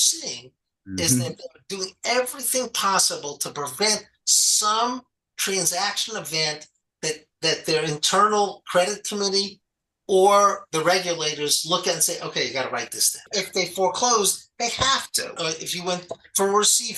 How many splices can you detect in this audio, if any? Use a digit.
2